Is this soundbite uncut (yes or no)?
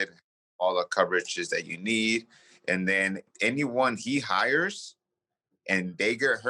no